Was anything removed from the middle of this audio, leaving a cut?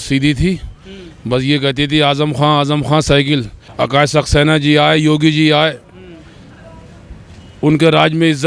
yes; 1 cut; at 3.6 s

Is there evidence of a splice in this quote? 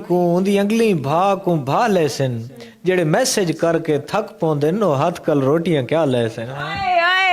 no; 0 cuts

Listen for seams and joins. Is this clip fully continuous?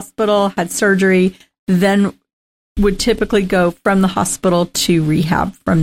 yes; 0 cuts

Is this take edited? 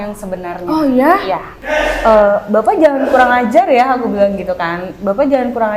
yes; 1 cut; at 1.6 s

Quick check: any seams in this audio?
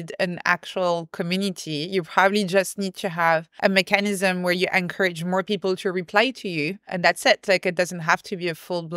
yes; 2 cuts; at 3.5 s, 6.8 s

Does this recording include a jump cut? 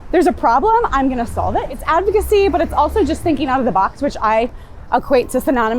yes; 1 cut; at 1.8 s

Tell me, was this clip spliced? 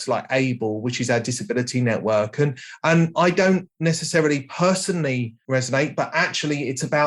no; 0 cuts

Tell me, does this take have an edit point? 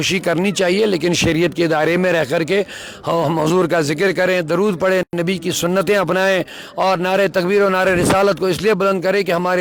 no; 0 cuts

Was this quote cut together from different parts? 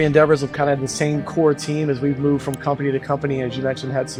no; 0 cuts

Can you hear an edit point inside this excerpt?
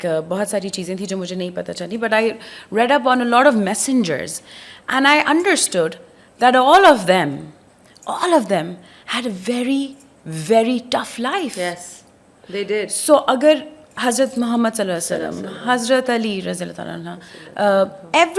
no; 0 cuts

